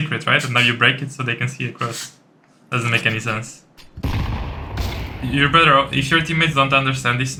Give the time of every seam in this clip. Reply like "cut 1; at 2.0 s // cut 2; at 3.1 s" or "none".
none